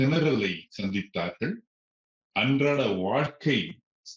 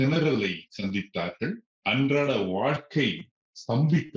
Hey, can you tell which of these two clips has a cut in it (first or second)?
second